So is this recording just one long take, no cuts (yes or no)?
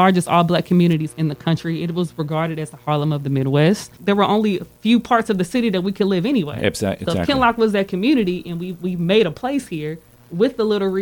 no